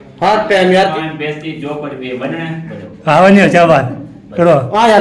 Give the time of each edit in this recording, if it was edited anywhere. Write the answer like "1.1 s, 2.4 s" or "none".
0.9 s